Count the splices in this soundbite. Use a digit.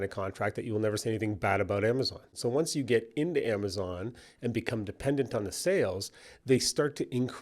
1